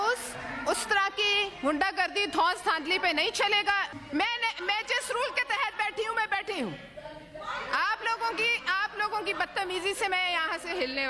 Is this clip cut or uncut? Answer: cut